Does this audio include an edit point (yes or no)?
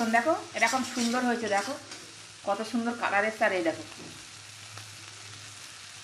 no